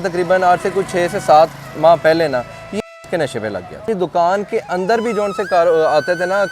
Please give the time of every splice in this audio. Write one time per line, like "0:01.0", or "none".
0:03.8